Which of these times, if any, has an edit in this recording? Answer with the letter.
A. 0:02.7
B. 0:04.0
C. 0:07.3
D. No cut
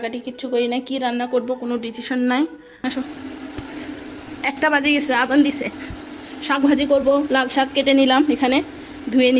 A